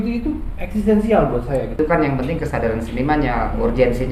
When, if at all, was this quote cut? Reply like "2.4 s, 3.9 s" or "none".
1.7 s